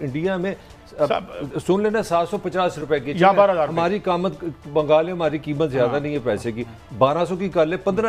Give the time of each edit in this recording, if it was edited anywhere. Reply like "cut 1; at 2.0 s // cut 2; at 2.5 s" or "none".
none